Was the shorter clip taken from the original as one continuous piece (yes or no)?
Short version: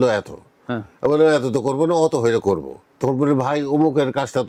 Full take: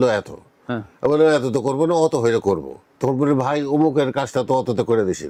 yes